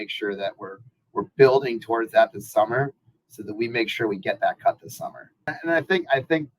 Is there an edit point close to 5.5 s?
yes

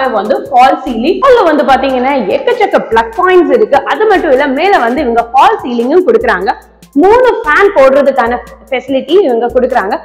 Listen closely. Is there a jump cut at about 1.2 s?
yes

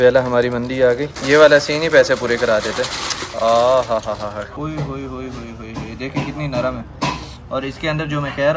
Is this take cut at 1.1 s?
yes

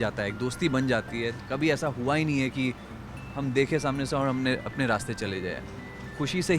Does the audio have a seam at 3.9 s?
no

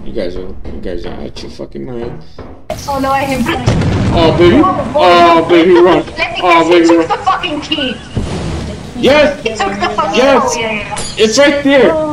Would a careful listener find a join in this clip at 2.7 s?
yes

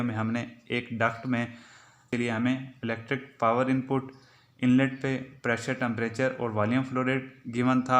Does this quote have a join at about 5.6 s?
no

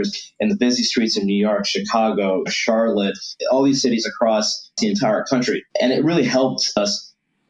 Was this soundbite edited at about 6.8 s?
yes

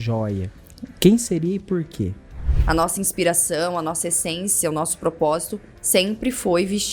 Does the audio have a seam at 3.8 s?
no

